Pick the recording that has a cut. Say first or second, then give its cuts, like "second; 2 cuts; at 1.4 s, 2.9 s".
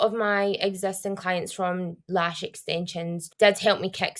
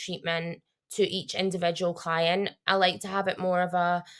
first; 1 cut; at 3.2 s